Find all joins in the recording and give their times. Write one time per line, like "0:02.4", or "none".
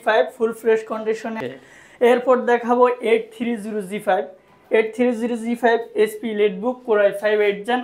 0:01.3